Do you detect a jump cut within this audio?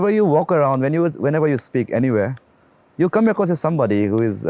no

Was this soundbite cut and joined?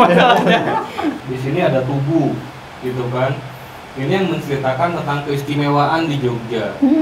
yes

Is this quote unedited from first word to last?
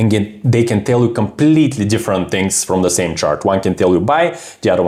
yes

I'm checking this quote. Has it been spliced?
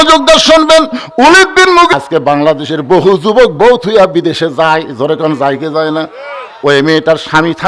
yes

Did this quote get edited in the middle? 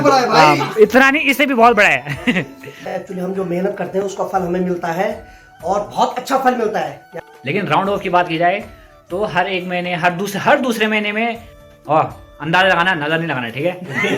yes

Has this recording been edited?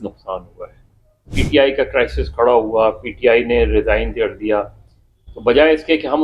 yes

